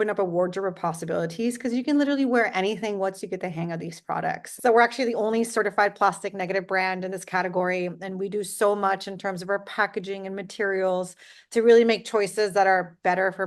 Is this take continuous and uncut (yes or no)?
no